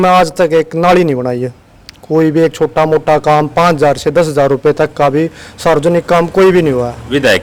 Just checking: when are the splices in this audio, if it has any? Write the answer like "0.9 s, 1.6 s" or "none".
none